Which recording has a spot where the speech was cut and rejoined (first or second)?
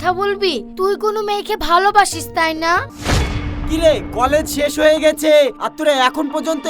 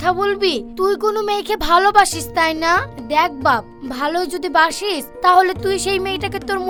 first